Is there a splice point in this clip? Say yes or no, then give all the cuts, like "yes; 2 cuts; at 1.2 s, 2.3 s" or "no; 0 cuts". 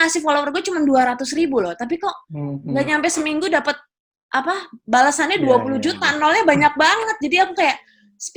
no; 0 cuts